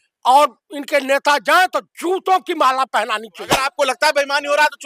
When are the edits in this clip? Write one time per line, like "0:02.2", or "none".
0:03.6